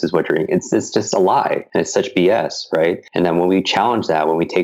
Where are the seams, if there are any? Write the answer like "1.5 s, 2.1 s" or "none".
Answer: 1.6 s, 3.1 s

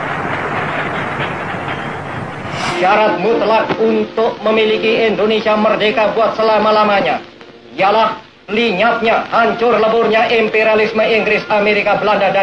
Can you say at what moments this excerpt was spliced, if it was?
2.6 s

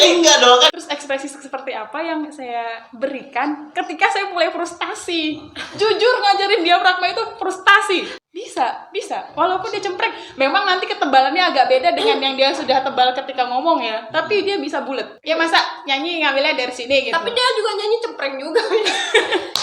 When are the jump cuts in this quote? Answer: 0.8 s, 8.1 s, 15.1 s

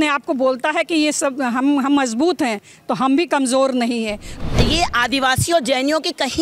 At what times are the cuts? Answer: 4.3 s

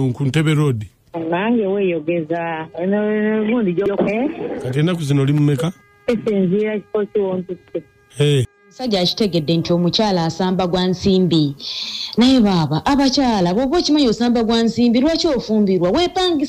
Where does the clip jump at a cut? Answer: 3.9 s, 8.6 s

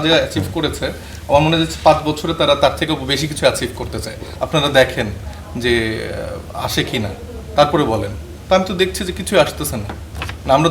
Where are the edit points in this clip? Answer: 4.2 s

